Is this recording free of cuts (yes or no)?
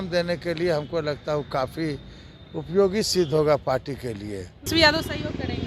no